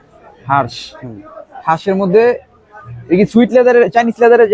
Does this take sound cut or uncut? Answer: uncut